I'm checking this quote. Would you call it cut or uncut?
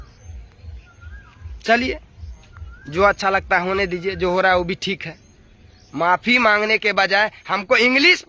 uncut